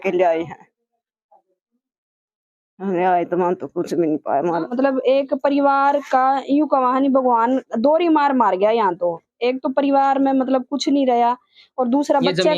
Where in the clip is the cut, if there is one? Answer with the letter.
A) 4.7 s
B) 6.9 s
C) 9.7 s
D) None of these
A